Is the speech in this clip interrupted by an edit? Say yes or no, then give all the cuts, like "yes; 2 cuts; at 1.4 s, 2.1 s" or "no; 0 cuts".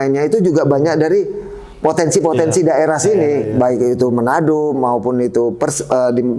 no; 0 cuts